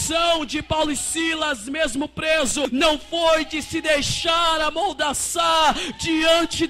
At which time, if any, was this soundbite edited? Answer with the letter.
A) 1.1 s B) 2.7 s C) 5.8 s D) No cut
B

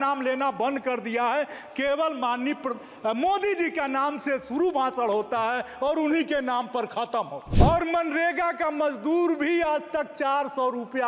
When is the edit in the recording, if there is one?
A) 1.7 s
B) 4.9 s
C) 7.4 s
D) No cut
C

